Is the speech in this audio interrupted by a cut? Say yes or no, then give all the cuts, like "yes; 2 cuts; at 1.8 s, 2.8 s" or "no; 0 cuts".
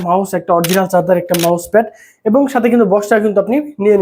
no; 0 cuts